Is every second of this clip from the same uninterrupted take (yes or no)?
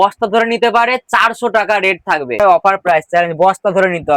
no